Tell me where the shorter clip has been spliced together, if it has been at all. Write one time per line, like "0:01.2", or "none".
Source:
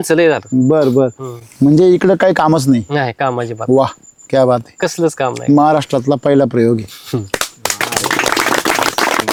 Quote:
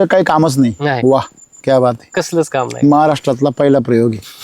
0:01.0